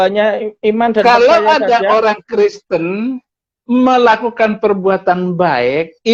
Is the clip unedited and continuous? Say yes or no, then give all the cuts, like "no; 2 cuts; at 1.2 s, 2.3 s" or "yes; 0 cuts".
yes; 0 cuts